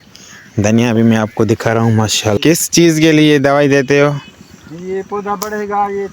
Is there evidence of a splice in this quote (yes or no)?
yes